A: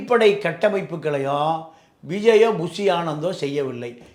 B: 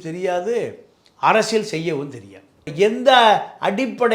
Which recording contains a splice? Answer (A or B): B